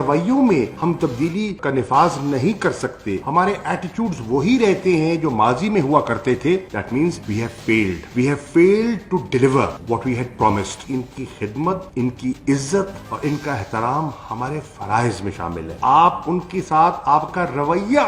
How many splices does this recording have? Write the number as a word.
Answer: two